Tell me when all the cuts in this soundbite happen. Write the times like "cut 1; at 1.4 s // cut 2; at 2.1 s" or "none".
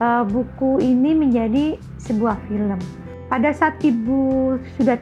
cut 1; at 3.1 s